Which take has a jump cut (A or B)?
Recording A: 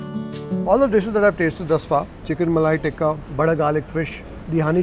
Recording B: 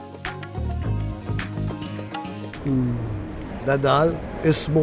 A